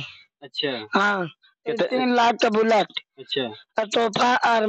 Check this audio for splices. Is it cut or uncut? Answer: uncut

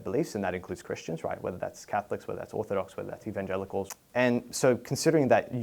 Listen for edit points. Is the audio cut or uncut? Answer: cut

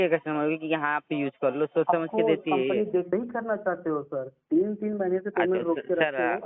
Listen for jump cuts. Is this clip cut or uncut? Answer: cut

